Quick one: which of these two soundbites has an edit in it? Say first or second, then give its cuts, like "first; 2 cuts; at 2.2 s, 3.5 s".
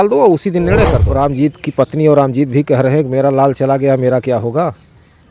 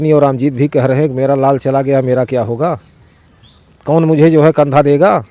first; 1 cut; at 1.0 s